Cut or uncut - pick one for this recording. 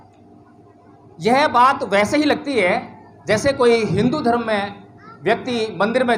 uncut